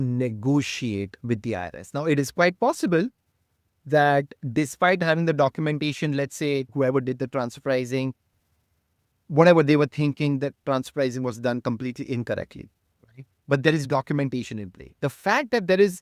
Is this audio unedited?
yes; 0 cuts

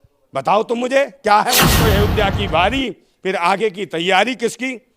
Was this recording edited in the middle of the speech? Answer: yes; 1 cut; at 1.7 s

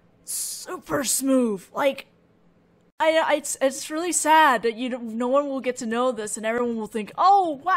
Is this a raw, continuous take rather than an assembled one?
no; 1 cut; at 5.6 s

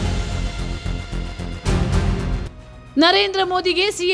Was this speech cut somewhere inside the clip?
yes; 1 cut; at 2.5 s

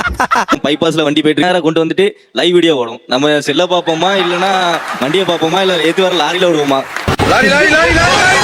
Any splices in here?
yes; 1 cut; at 1.4 s

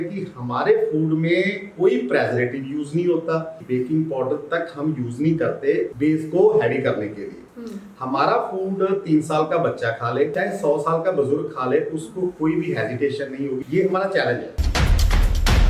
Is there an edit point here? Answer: yes; 5 cuts; at 3.6 s, 5.9 s, 10.3 s, 13.6 s, 14.6 s

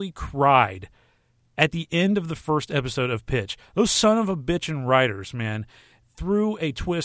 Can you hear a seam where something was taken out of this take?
no; 0 cuts

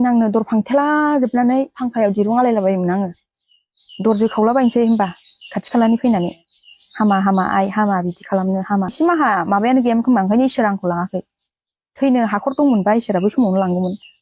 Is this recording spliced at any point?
yes; 1 cut; at 8.9 s

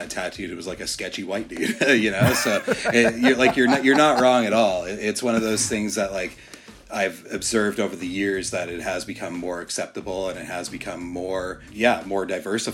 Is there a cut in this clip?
yes; 1 cut; at 11.6 s

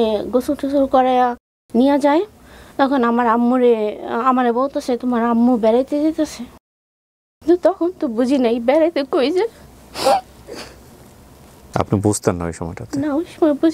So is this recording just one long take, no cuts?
yes; 0 cuts

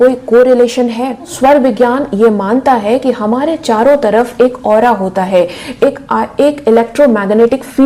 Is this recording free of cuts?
yes; 0 cuts

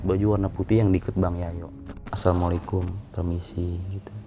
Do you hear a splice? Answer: yes; 1 cut; at 2.1 s

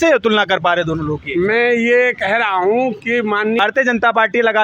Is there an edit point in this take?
yes; 1 cut; at 3.6 s

